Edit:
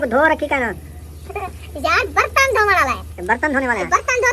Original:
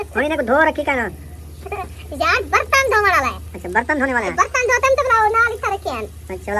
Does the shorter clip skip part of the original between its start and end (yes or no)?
yes